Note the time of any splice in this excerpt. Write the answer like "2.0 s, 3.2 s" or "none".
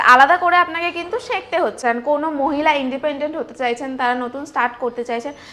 1.8 s